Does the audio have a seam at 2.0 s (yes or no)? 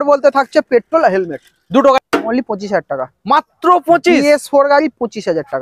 yes